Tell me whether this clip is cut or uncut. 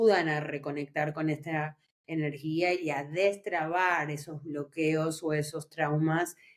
uncut